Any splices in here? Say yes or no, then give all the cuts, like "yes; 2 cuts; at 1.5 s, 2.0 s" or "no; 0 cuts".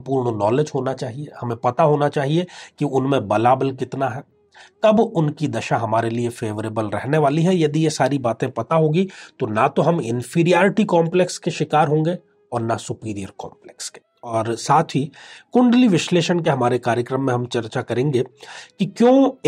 yes; 1 cut; at 14.0 s